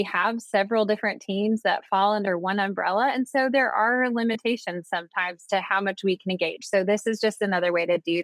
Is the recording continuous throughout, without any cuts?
yes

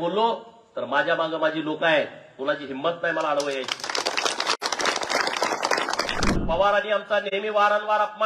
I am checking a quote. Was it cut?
yes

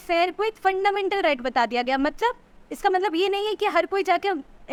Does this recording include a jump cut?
no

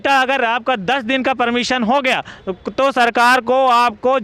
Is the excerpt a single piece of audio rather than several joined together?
yes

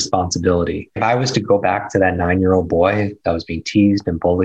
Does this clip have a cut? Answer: yes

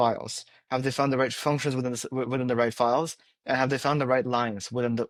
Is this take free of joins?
yes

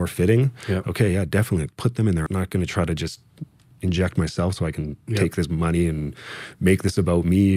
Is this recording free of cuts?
no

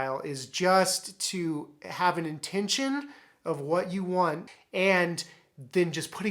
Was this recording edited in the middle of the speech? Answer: yes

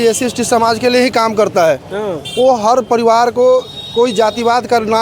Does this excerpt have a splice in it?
no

